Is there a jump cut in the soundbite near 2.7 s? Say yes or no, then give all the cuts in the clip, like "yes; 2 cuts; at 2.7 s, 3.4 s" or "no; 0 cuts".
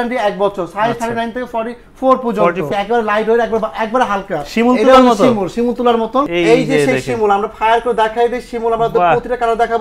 yes; 2 cuts; at 2.7 s, 6.3 s